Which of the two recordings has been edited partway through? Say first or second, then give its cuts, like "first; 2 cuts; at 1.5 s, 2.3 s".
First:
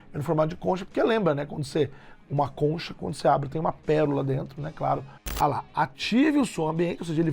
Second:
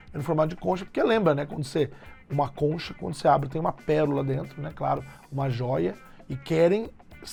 first; 1 cut; at 5.2 s